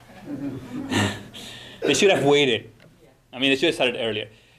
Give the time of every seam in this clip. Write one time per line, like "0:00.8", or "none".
0:02.1

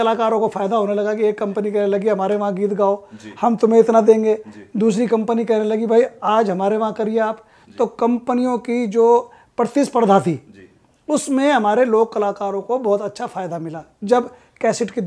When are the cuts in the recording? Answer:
none

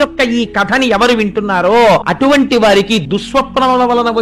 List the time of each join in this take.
0:02.1
0:03.0

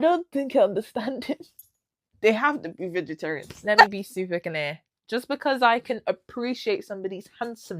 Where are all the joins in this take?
0:03.9

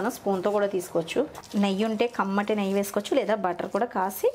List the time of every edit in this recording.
0:01.4

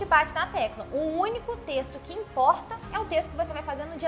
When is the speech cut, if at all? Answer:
none

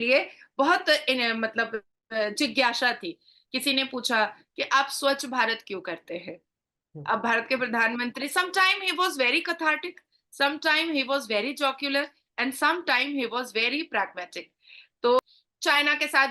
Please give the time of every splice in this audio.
0:15.2

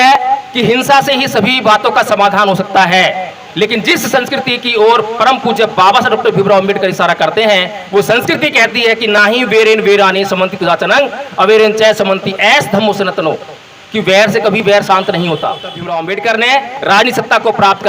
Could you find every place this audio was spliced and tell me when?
0:15.8

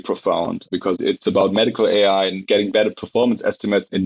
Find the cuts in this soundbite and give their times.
0:00.9
0:02.4

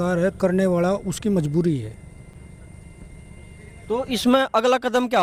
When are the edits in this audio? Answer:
none

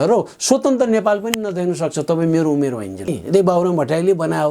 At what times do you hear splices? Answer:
0:03.1

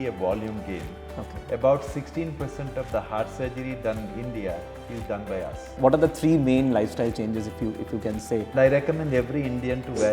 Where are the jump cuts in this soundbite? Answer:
0:05.8
0:08.5

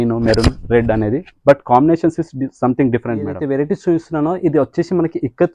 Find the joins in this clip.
0:03.4

